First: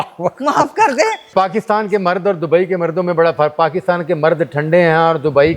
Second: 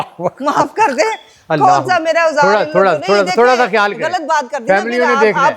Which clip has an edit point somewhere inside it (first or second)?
first